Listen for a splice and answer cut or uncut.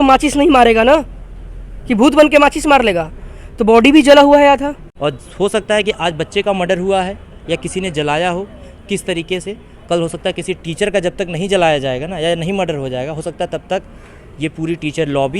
cut